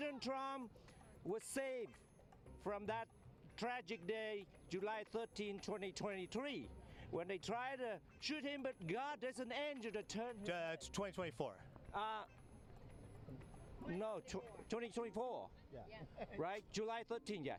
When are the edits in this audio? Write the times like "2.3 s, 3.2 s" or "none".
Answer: none